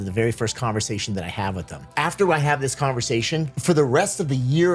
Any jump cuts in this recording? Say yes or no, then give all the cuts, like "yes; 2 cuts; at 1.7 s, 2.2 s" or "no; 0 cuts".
yes; 2 cuts; at 1.8 s, 3.5 s